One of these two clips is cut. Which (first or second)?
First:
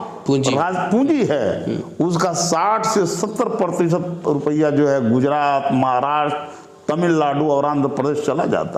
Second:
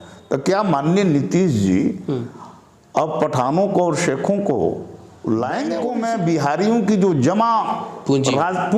second